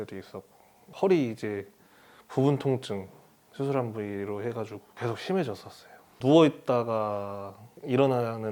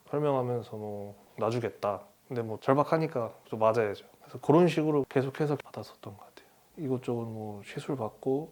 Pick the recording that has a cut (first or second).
first